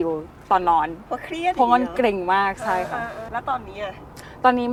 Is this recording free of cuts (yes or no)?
yes